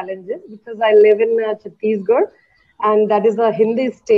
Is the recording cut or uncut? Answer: uncut